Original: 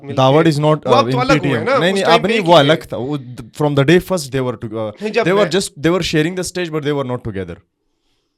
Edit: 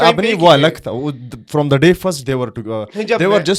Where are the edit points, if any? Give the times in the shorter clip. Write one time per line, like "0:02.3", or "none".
none